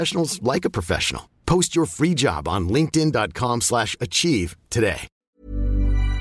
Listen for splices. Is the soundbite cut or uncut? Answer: cut